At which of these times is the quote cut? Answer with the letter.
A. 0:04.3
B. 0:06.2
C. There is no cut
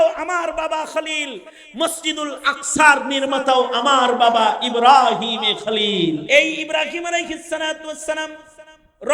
B